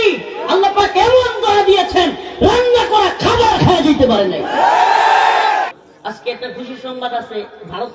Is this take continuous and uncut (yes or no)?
no